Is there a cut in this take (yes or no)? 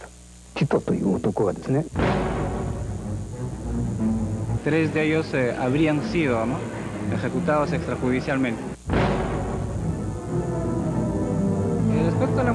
yes